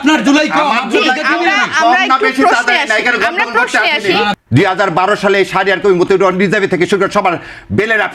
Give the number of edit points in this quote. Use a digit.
1